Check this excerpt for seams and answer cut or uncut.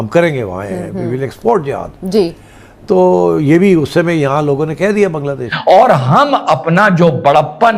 cut